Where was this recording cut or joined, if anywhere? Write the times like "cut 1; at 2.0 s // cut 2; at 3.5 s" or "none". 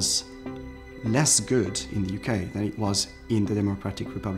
none